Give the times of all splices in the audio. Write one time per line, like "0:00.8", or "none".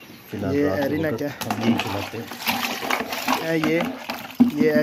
0:03.5